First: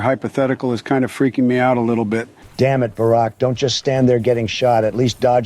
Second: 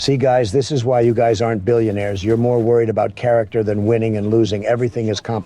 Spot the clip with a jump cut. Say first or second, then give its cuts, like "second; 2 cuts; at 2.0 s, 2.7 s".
first; 1 cut; at 2.4 s